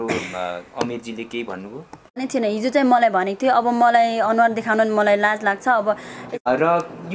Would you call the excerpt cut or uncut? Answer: cut